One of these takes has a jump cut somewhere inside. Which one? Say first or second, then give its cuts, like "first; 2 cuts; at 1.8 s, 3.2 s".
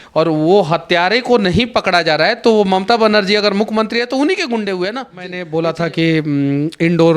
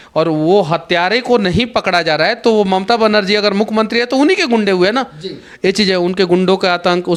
first; 1 cut; at 5.5 s